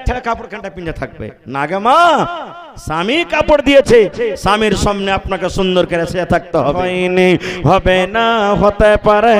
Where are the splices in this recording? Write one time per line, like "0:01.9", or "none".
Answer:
0:06.9